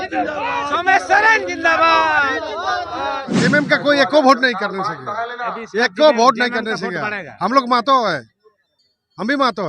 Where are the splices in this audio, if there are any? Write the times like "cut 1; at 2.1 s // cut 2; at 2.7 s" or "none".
cut 1; at 3.4 s